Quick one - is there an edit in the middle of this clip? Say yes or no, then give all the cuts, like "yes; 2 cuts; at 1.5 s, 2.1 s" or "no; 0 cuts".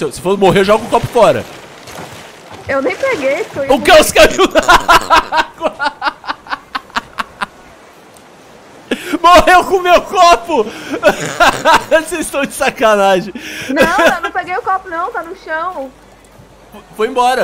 no; 0 cuts